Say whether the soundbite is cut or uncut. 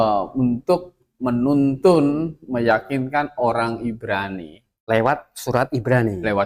uncut